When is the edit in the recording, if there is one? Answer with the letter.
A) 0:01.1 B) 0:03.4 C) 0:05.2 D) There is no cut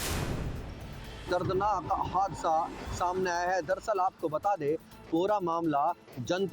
A